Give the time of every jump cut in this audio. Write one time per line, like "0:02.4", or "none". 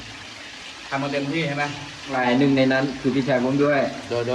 0:02.1